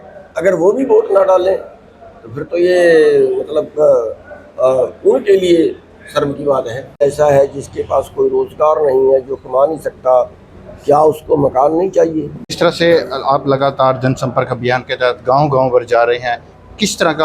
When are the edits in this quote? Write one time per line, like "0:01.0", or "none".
0:07.0
0:12.6

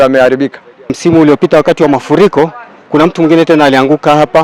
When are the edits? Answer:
0:00.9

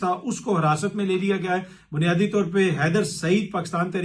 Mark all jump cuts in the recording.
none

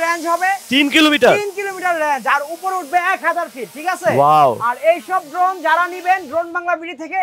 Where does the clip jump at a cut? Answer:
none

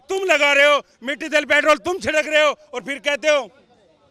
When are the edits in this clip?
none

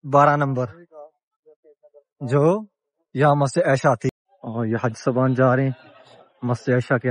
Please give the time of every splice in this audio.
0:04.1

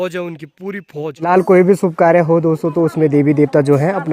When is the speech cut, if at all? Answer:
0:01.3

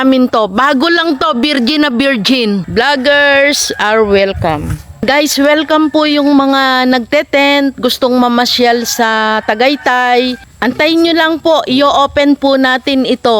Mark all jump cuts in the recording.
0:02.7
0:05.0
0:10.5

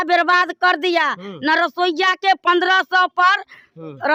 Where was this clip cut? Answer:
none

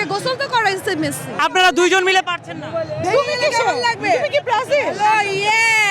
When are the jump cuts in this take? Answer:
0:01.4

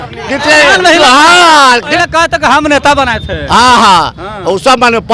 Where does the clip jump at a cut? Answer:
0:01.9

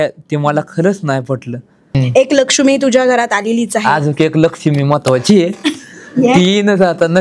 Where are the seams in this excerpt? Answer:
0:01.9

